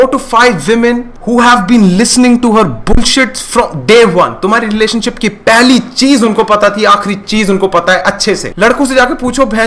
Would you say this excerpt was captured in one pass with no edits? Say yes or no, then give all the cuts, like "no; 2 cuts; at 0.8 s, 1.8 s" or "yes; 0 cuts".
no; 2 cuts; at 1.1 s, 8.5 s